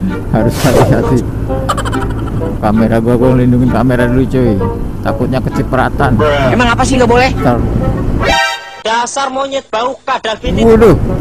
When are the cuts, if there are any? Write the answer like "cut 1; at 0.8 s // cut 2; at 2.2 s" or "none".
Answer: cut 1; at 2.6 s // cut 2; at 7.6 s